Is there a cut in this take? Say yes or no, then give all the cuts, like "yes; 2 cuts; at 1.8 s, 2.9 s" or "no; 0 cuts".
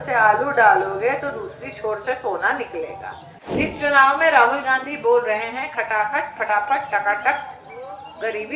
yes; 1 cut; at 3.6 s